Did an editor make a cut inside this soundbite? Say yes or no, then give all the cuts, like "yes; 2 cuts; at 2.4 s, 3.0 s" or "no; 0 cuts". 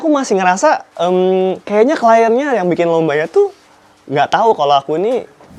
no; 0 cuts